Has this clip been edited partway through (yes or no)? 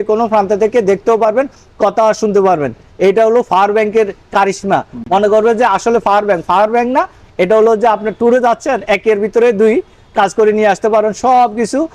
no